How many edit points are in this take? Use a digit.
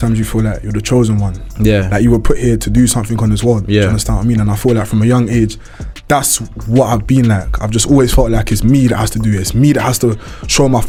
0